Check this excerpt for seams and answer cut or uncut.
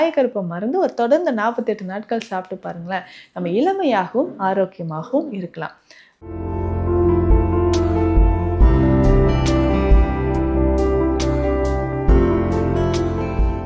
cut